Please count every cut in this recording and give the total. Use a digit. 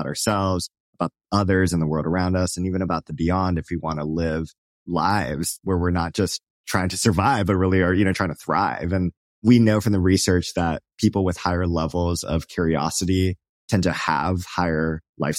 3